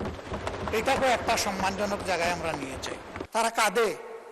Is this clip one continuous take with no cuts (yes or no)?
no